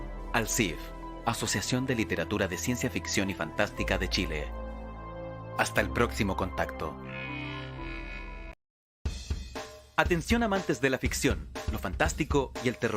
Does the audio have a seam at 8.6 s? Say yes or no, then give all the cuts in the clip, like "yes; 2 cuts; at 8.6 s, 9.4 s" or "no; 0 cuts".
yes; 1 cut; at 8.6 s